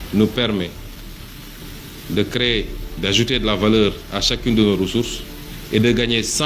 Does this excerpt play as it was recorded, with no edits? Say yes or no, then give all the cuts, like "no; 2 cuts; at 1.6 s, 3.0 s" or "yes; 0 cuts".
yes; 0 cuts